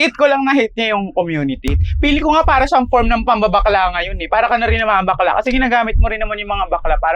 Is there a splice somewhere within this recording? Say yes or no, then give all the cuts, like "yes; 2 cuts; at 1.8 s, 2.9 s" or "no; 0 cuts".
yes; 1 cut; at 1.7 s